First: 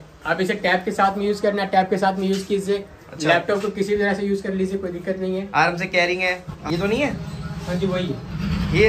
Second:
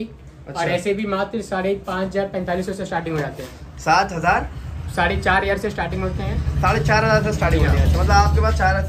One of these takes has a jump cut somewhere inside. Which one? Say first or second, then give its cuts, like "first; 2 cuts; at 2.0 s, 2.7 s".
first; 1 cut; at 6.5 s